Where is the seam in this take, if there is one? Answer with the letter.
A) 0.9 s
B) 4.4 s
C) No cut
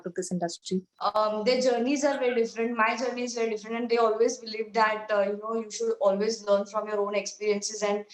A